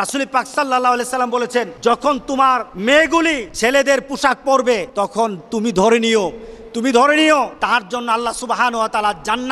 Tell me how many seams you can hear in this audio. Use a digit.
5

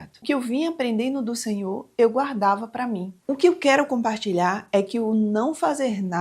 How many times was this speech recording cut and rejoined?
1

